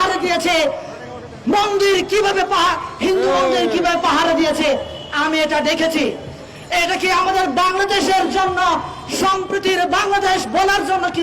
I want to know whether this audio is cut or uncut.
uncut